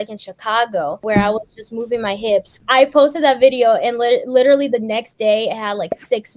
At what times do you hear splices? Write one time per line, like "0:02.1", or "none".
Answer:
0:01.0
0:02.5